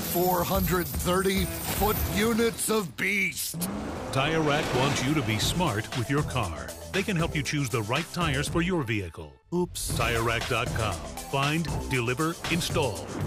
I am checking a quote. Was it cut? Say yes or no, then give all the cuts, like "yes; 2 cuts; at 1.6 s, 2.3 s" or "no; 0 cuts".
no; 0 cuts